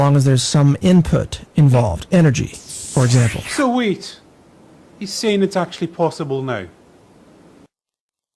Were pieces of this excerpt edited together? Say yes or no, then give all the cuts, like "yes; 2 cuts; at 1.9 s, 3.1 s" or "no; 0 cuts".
yes; 1 cut; at 2.9 s